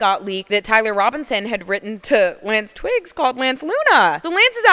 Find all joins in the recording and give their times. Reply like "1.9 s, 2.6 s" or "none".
none